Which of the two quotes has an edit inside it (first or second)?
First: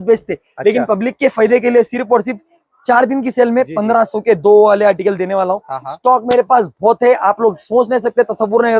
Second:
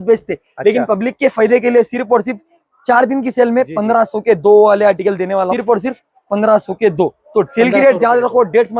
second